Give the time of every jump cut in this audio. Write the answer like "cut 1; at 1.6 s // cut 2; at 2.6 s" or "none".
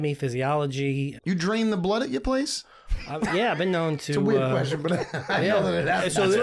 cut 1; at 1.1 s